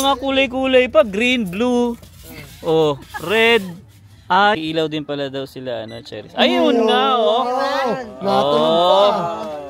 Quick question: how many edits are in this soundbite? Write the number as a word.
one